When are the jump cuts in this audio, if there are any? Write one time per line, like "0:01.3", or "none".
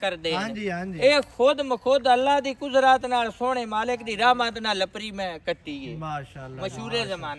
none